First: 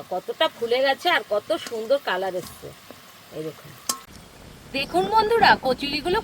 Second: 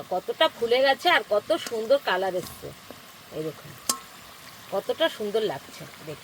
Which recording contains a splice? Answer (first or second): first